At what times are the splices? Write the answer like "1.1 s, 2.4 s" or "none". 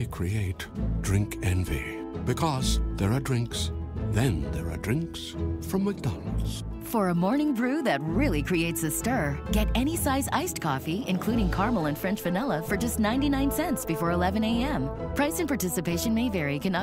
none